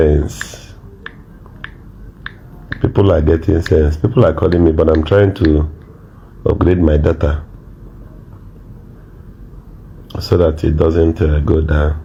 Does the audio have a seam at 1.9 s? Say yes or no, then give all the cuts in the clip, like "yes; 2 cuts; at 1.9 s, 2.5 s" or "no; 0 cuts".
no; 0 cuts